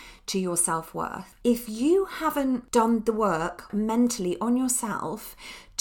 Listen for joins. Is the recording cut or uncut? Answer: cut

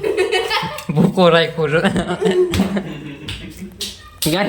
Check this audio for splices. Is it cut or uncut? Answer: uncut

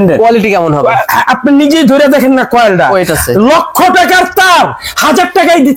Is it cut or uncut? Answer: uncut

